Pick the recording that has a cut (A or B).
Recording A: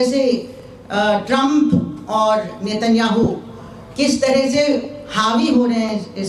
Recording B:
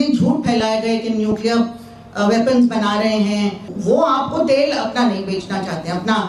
B